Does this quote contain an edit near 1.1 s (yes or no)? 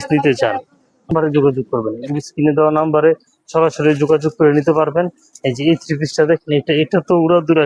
yes